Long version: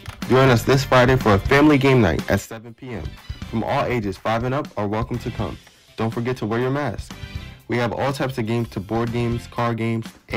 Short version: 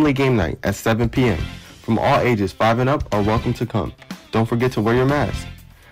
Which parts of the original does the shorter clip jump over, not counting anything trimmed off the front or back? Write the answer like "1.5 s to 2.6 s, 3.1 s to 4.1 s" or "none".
none